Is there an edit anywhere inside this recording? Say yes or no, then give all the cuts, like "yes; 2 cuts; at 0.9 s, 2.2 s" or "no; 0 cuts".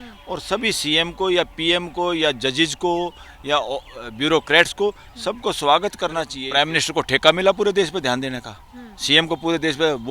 yes; 1 cut; at 6.4 s